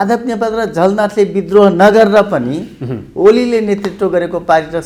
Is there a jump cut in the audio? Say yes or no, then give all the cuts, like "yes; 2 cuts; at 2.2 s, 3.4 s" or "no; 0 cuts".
no; 0 cuts